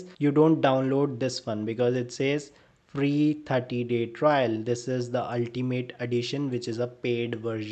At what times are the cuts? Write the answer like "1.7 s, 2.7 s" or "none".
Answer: none